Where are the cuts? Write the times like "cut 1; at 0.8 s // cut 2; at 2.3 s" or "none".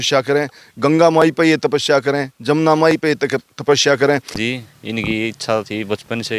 cut 1; at 4.4 s